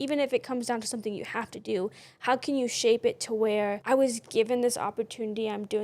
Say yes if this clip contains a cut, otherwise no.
yes